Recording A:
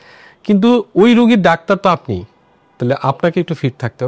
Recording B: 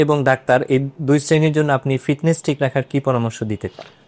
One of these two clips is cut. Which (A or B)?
B